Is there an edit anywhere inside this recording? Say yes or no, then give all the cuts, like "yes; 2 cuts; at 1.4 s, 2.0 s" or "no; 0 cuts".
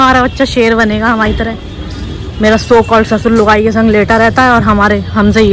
no; 0 cuts